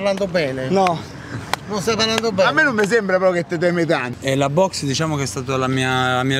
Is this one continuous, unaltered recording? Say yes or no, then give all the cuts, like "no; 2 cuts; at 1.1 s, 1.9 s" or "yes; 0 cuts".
no; 1 cut; at 4.1 s